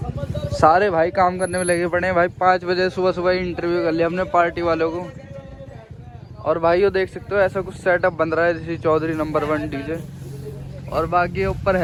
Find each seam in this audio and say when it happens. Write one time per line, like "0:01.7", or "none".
none